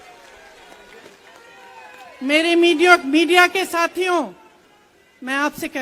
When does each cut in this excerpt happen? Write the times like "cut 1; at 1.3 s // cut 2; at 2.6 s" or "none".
none